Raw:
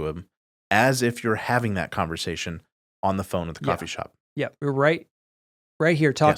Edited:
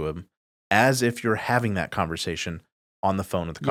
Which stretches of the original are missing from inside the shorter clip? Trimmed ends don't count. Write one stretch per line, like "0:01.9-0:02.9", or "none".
none